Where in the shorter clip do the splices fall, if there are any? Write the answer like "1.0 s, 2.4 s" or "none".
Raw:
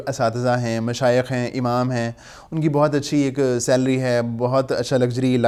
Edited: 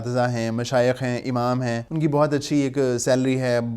1.9 s